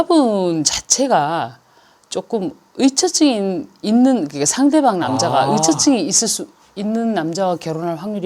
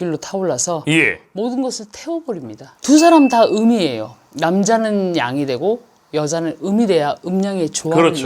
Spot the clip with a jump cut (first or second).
second